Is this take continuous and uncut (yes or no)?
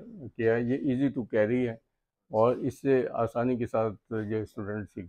yes